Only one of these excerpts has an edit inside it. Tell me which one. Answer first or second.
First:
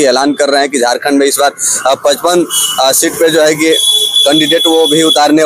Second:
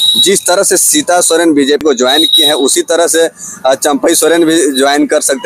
second